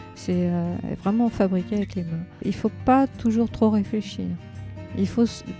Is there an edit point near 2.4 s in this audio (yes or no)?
yes